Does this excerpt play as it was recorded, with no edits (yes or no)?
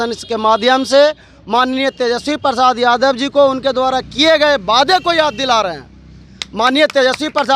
yes